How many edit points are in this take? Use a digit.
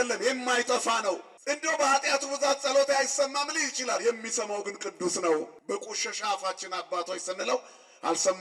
2